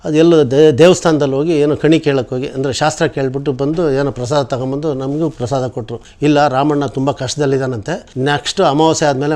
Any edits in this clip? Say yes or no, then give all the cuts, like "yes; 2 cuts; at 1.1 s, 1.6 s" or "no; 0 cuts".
no; 0 cuts